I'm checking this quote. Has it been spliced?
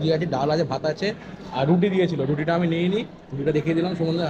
no; 0 cuts

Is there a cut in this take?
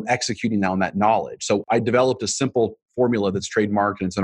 yes; 1 cut; at 1.6 s

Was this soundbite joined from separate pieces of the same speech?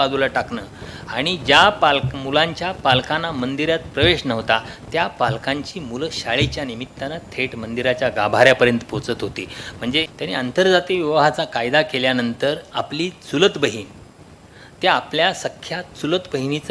yes; 1 cut; at 10.1 s

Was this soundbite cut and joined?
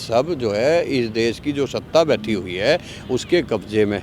no; 0 cuts

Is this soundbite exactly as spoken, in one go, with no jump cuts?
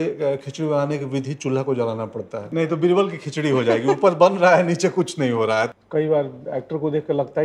no; 2 cuts; at 2.4 s, 5.7 s

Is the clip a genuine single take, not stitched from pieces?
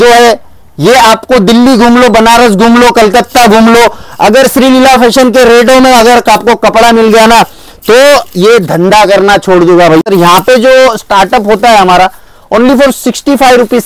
no; 1 cut; at 10.0 s

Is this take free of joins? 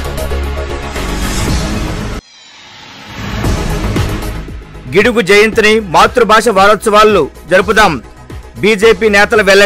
yes; 0 cuts

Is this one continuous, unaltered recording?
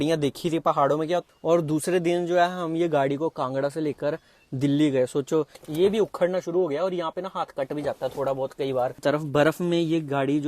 no; 3 cuts; at 1.3 s, 5.6 s, 9.0 s

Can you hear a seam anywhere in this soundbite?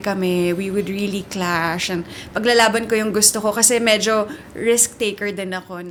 no; 0 cuts

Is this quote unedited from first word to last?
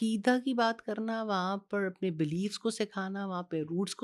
yes; 0 cuts

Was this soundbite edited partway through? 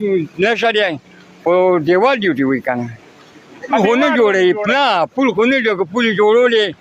yes; 1 cut; at 3.8 s

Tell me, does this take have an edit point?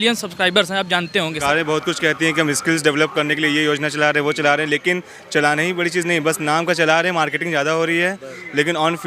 yes; 1 cut; at 1.4 s

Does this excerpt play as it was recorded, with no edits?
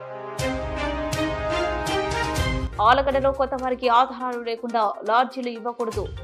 yes; 0 cuts

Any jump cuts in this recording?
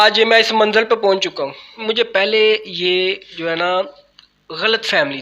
yes; 1 cut; at 1.7 s

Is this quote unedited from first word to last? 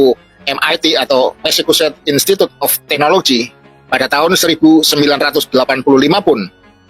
yes; 0 cuts

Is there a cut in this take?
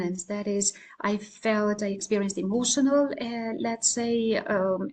no; 0 cuts

